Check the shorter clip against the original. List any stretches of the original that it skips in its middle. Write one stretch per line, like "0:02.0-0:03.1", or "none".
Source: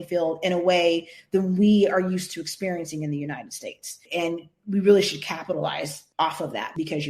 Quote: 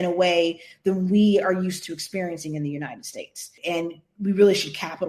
none